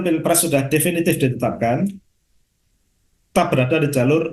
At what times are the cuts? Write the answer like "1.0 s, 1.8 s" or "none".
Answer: none